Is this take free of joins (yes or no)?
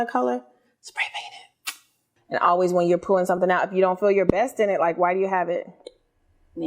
no